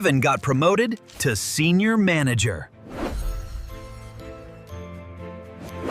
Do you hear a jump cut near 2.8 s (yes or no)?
yes